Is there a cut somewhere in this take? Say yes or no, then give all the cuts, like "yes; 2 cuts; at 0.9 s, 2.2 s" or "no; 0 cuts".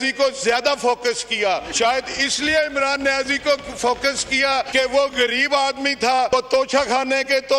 yes; 3 cuts; at 1.7 s, 4.7 s, 6.3 s